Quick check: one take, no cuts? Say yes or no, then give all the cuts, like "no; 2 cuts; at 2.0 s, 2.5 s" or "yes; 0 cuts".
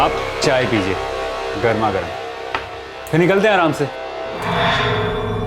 no; 1 cut; at 4.4 s